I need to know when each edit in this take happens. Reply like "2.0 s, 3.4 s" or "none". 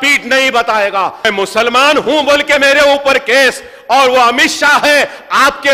1.2 s